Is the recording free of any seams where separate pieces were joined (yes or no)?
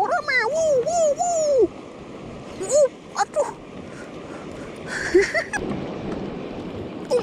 no